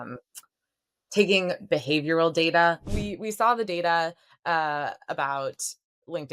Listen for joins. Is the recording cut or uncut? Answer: cut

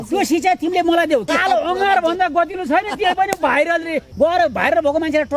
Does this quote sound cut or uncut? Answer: cut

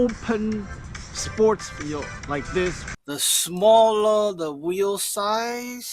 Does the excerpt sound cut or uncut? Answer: cut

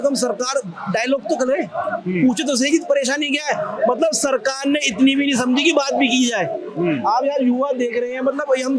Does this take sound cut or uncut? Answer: uncut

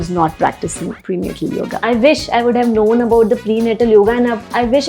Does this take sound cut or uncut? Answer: cut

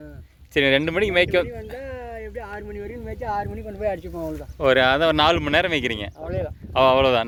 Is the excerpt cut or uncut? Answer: uncut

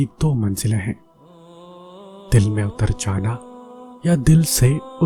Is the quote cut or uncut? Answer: uncut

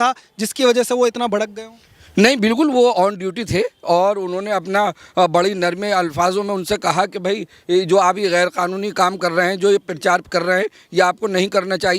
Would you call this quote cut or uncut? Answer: uncut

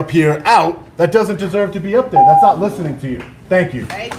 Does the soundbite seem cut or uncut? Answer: uncut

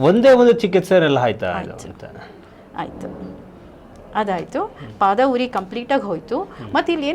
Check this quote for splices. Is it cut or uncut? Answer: uncut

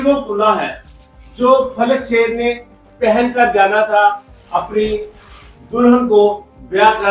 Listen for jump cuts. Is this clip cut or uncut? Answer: uncut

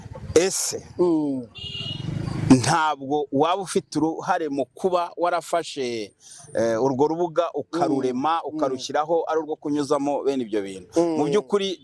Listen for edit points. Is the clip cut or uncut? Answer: uncut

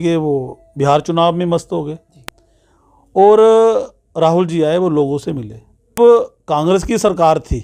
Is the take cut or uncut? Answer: cut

